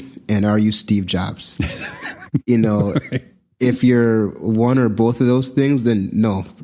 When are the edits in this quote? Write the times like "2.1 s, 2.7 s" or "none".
none